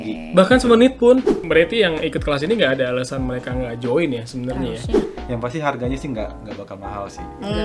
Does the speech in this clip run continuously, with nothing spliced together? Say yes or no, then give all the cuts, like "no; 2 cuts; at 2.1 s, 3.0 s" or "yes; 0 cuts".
no; 2 cuts; at 1.4 s, 5.0 s